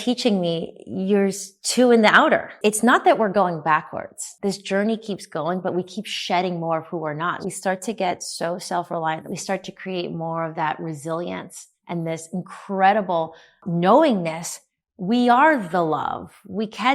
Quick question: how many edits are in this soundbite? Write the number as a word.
five